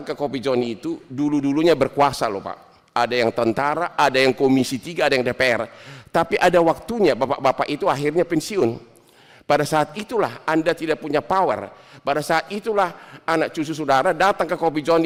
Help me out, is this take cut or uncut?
uncut